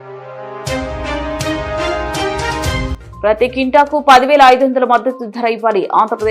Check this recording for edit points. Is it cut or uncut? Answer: cut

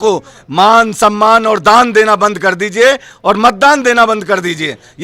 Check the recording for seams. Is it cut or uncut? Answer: uncut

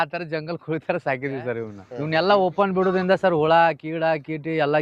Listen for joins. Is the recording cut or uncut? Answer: cut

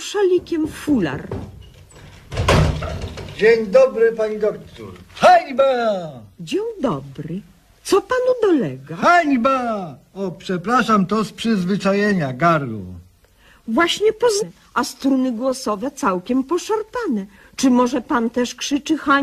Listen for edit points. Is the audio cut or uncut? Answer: uncut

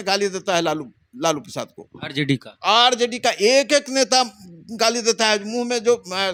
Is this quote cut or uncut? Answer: uncut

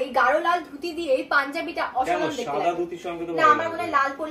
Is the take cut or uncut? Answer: uncut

